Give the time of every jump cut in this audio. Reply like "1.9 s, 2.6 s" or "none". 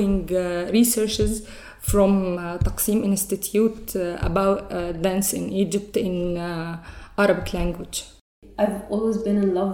8.4 s